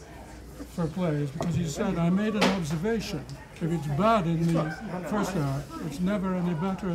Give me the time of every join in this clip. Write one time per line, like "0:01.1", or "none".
0:02.0